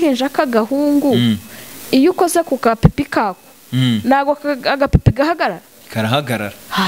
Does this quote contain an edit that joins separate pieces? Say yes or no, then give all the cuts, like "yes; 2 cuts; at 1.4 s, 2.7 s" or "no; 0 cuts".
no; 0 cuts